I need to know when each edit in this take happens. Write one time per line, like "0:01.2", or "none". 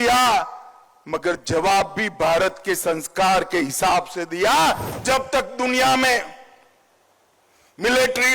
0:04.9

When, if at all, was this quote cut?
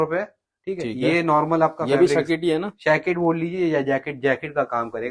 none

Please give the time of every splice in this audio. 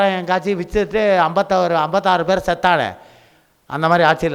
none

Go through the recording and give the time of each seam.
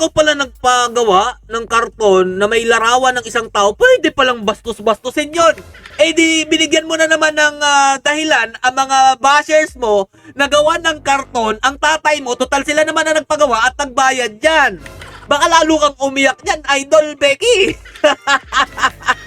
none

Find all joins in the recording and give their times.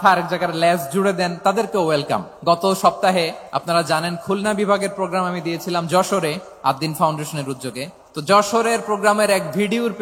0:02.3
0:03.5
0:06.5
0:08.0

